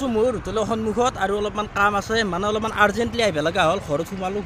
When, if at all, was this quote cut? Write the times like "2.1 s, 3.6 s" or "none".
none